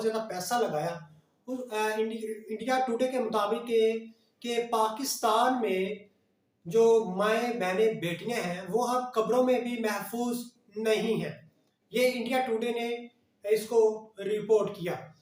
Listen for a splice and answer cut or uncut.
uncut